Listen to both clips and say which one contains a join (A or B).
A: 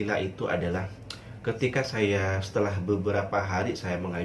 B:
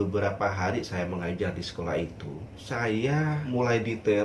B